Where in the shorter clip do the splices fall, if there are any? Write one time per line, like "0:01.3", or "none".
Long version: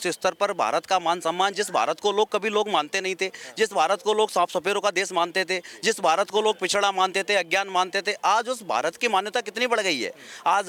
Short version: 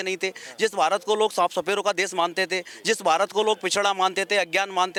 none